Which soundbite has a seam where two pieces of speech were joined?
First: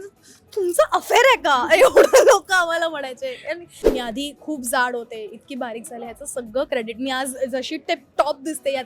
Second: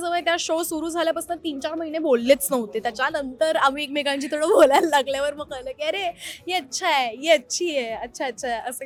first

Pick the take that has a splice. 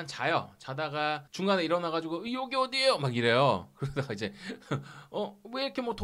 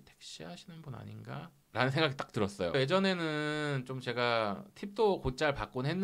second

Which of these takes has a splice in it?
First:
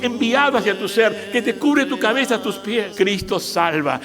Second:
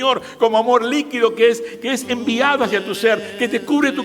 first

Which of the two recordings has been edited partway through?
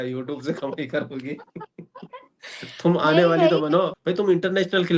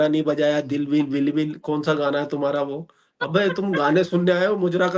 first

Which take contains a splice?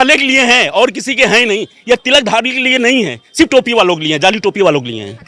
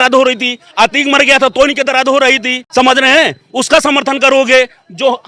second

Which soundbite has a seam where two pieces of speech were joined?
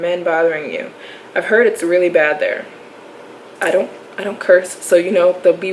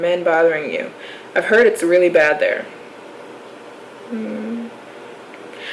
first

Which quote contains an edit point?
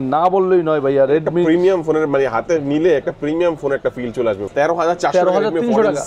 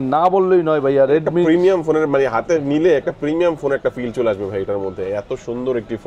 first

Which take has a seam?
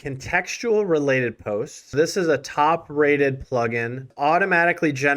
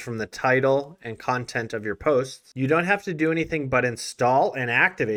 first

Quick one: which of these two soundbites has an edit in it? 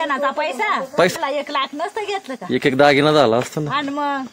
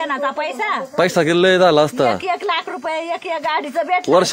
first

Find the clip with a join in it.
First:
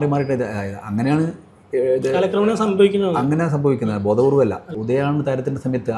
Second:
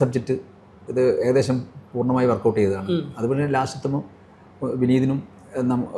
first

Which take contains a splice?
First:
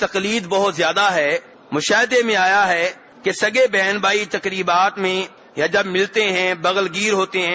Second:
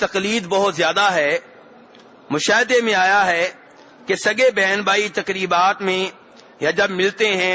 first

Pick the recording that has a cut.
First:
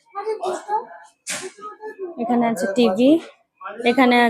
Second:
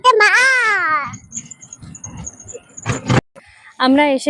second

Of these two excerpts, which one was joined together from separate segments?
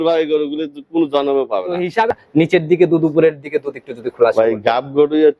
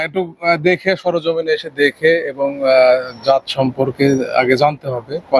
first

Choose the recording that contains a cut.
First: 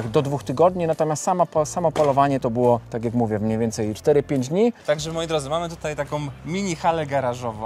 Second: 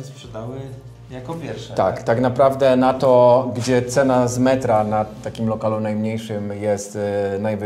first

